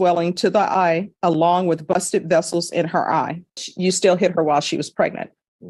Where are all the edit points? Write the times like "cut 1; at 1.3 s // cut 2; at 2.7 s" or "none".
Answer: cut 1; at 3.7 s